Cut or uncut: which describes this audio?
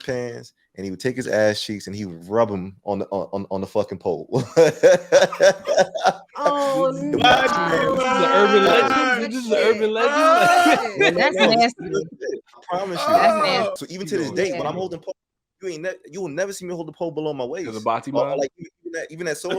cut